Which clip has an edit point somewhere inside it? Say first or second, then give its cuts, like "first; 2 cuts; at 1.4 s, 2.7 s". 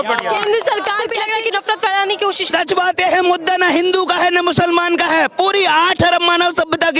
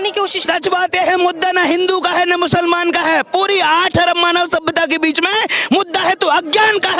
first; 1 cut; at 1.1 s